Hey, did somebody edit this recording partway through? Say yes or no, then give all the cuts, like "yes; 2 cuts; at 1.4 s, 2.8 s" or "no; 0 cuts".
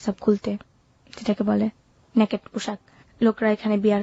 no; 0 cuts